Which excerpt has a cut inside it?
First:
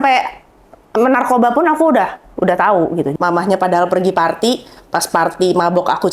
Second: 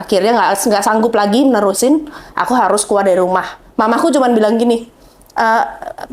first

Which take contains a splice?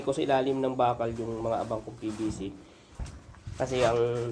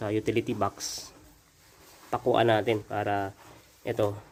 first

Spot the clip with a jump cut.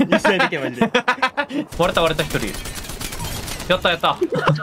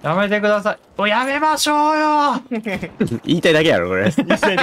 first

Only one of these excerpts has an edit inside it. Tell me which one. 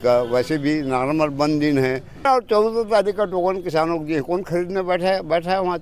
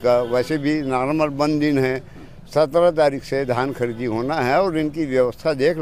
first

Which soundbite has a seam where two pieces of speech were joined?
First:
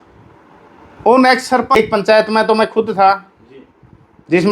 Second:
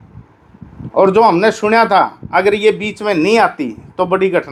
first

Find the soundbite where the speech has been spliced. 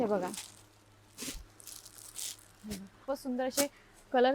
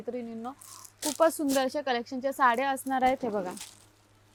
first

